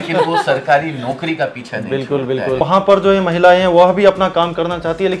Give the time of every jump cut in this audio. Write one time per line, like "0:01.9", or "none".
0:02.6